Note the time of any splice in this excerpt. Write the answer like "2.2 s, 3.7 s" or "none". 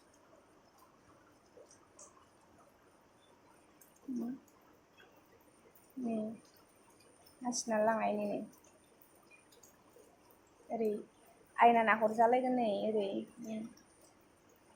none